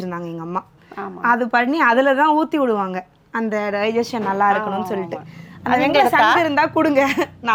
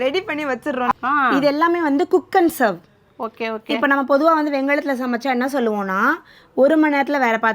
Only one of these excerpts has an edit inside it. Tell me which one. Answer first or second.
second